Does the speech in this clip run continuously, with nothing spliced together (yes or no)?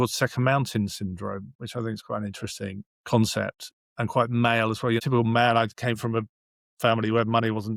yes